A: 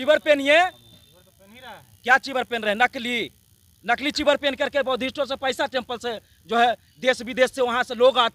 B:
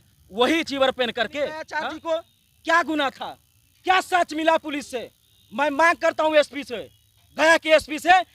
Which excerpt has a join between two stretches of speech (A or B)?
B